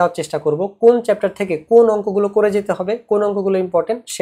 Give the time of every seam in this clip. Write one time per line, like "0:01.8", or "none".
none